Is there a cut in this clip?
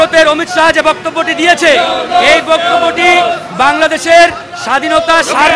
no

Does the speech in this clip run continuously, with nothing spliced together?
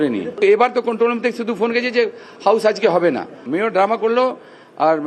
yes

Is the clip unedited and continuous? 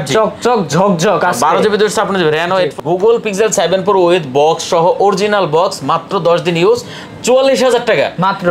no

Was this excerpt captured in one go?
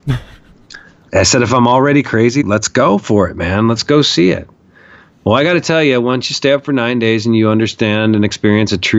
no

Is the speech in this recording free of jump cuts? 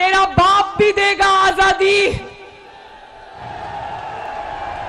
yes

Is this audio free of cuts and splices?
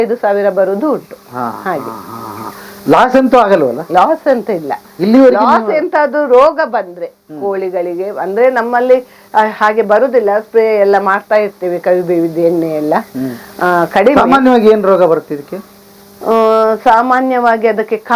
yes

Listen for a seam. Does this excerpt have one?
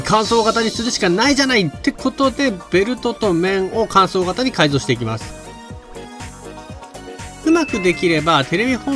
no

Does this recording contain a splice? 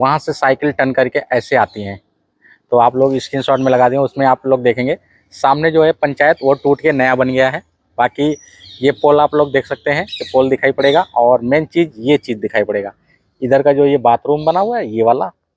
no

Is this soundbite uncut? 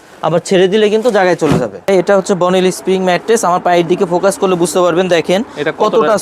no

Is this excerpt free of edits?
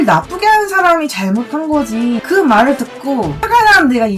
yes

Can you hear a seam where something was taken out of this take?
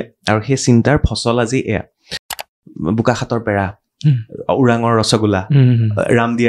yes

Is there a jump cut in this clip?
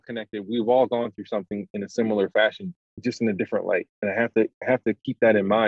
yes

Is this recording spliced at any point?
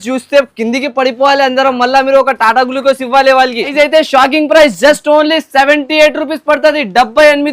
yes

